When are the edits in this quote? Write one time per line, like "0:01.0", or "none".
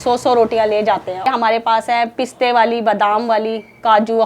0:01.2